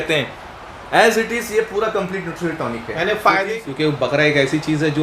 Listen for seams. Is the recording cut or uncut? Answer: cut